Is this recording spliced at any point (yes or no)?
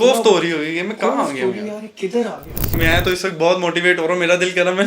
yes